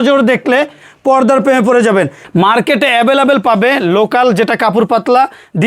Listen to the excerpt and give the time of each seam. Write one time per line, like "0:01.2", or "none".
0:02.2